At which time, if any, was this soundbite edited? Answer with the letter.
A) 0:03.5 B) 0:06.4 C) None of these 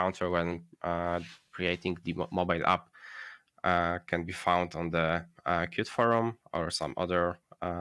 C